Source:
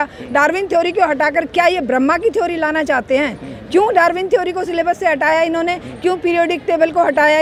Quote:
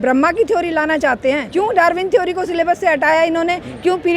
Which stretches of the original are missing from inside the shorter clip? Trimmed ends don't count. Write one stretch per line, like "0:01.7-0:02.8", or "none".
0:03.3-0:03.6